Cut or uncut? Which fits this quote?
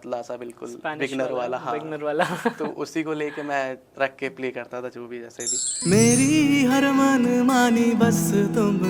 cut